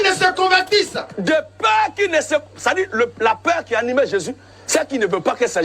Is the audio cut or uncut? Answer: cut